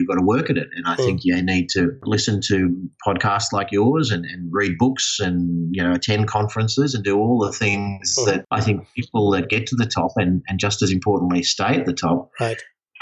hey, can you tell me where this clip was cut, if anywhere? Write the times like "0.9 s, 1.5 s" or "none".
2.0 s, 8.5 s